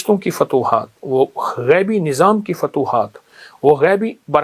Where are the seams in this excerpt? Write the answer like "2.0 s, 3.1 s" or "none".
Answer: none